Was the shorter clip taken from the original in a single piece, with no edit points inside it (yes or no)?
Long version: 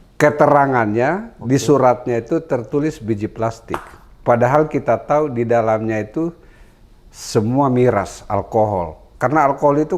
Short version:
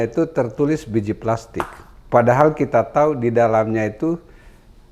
yes